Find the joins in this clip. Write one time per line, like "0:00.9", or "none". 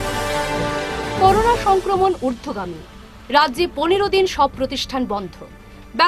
none